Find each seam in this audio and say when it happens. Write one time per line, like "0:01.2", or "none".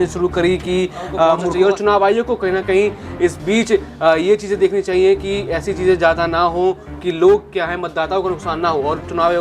0:01.5